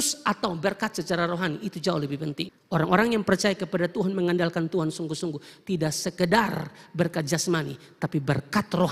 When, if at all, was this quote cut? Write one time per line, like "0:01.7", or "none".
0:02.5